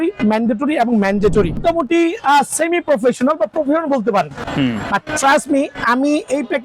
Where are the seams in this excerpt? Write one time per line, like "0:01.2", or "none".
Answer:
0:01.6
0:04.4

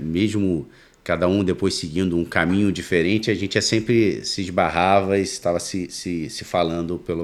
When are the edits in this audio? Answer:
none

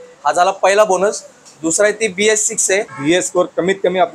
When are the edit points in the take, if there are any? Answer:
0:02.9

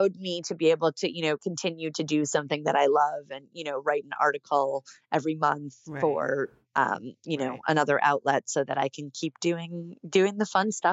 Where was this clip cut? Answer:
none

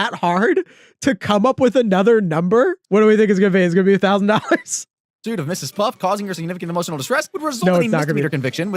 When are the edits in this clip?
0:02.8

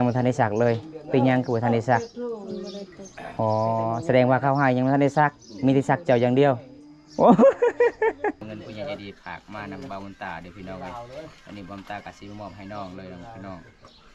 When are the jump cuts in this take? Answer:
0:08.4

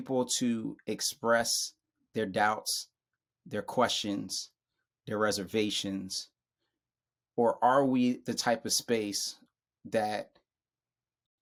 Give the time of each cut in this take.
none

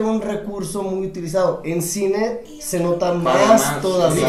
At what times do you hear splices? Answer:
none

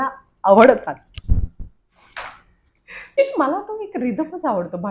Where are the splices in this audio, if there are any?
0:03.2

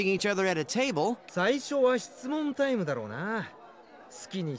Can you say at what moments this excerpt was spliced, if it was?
0:01.2

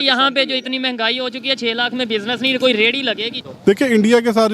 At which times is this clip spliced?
0:03.4

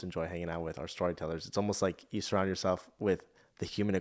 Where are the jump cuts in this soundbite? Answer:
none

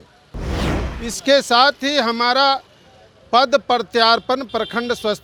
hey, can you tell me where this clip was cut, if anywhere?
none

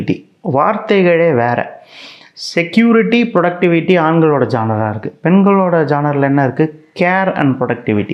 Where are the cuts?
none

